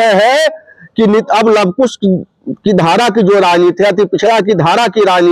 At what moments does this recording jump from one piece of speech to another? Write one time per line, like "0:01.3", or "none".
none